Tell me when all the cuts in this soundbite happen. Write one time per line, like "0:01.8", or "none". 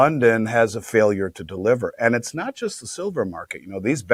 none